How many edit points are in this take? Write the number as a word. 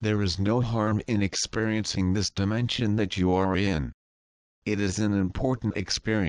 one